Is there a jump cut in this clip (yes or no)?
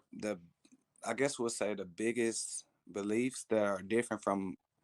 no